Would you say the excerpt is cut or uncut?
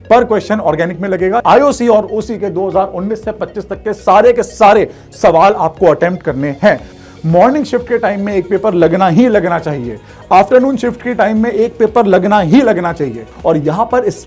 cut